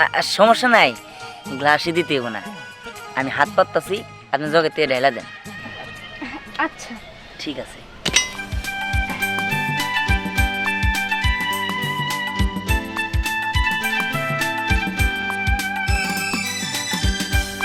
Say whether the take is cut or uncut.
uncut